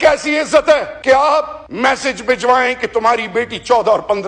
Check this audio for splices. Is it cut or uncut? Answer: cut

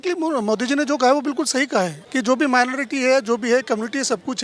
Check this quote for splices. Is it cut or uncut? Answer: cut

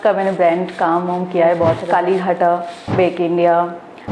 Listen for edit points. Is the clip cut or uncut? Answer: cut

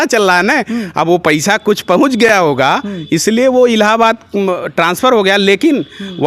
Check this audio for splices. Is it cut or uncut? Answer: uncut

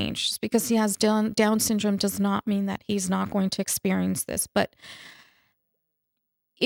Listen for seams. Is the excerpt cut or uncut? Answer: uncut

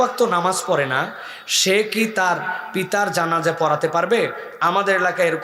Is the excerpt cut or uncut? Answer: uncut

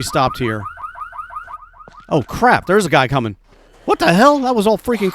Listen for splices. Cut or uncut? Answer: cut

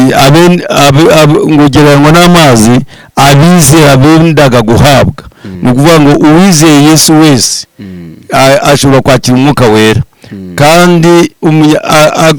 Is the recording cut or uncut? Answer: uncut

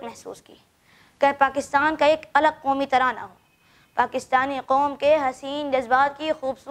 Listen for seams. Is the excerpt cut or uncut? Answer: uncut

